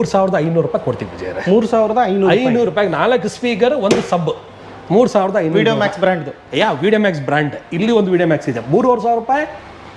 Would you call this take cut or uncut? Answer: uncut